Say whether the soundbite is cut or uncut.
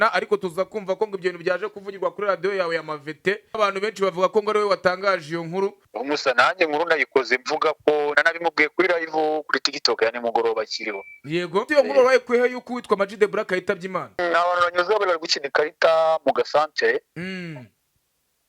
cut